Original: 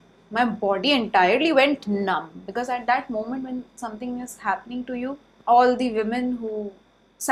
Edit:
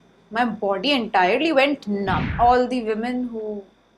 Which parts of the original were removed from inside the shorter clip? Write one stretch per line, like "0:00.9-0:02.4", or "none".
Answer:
0:02.3-0:05.4